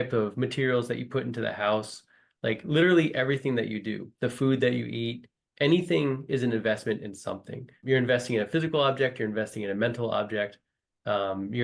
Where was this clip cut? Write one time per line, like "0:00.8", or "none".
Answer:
0:07.8